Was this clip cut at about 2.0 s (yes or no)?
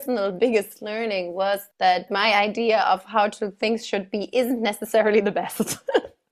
yes